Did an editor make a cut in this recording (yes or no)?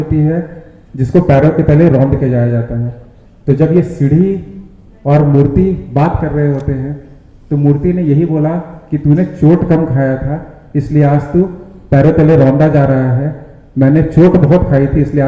no